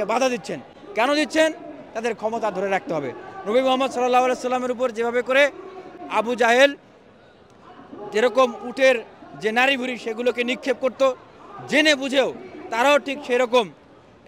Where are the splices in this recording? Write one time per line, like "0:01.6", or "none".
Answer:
none